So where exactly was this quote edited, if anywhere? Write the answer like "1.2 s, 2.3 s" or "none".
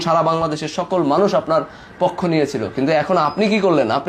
none